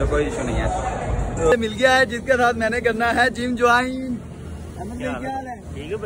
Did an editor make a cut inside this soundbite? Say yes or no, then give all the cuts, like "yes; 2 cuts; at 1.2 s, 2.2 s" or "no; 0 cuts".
yes; 1 cut; at 1.5 s